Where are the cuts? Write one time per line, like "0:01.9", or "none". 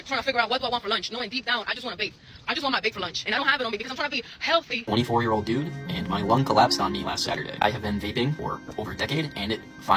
0:03.3
0:04.8
0:08.4